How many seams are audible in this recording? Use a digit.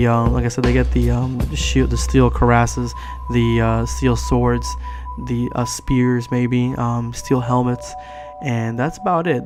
0